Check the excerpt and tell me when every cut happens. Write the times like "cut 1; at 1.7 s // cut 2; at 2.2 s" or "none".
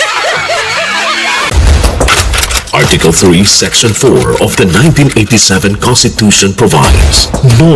cut 1; at 1.5 s